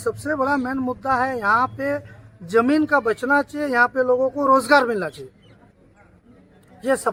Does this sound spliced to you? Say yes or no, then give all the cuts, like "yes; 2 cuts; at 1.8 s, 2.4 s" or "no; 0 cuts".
no; 0 cuts